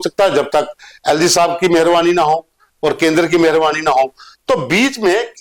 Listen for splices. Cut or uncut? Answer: uncut